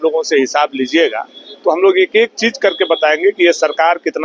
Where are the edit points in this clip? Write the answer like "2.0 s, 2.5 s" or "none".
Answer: none